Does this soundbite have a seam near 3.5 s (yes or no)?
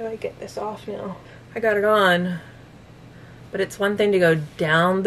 no